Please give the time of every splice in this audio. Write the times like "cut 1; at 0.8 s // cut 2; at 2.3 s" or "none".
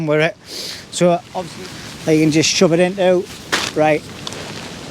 cut 1; at 1.4 s